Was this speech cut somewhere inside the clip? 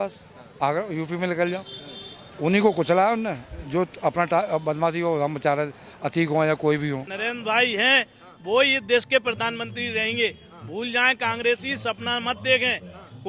yes; 1 cut; at 7.1 s

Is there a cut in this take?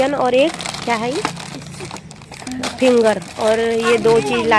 no; 0 cuts

